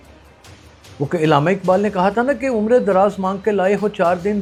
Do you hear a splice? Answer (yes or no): no